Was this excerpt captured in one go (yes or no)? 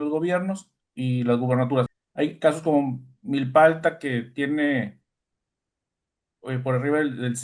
no